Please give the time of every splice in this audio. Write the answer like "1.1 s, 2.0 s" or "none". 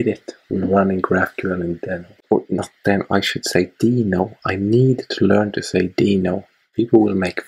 2.1 s, 6.6 s